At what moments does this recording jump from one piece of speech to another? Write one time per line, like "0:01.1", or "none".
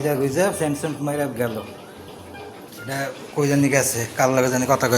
0:02.7